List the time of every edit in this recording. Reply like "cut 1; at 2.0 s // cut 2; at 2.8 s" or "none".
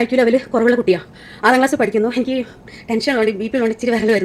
none